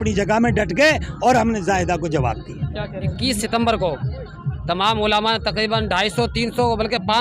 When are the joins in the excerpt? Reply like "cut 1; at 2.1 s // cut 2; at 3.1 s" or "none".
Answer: cut 1; at 3.1 s